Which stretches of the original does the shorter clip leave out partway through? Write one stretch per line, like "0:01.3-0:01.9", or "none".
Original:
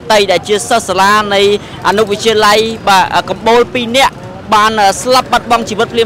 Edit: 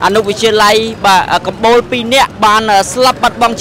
0:04.2-0:04.4